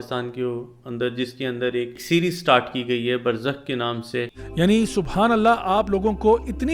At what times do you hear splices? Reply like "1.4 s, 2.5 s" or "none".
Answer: 2.0 s, 4.4 s

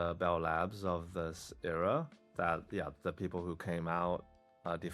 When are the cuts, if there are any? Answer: none

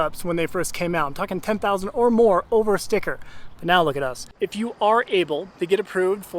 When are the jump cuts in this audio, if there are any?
4.4 s

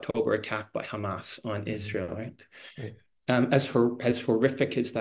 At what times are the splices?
none

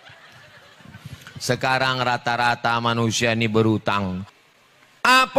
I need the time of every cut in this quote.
4.3 s

